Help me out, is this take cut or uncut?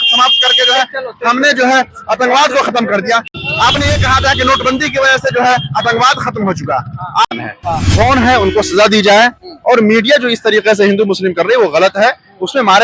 cut